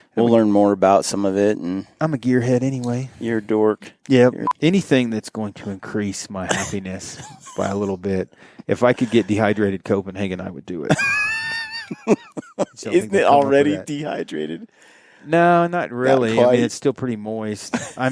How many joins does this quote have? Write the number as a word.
one